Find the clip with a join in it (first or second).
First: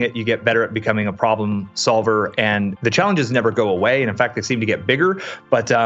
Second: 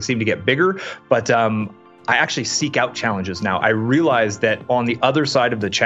first